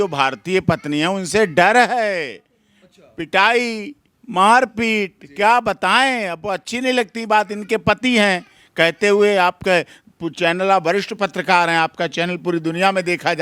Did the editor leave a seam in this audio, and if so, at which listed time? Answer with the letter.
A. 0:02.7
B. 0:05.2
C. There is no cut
C